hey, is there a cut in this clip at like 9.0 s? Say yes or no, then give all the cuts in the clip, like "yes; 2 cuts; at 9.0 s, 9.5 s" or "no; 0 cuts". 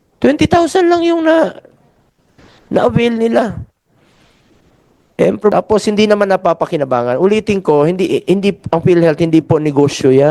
no; 1 cut; at 5.5 s